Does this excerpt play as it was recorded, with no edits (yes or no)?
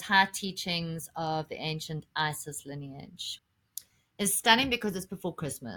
no